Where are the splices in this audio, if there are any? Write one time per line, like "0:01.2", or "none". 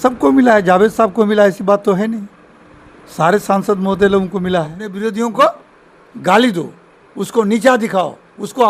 0:04.8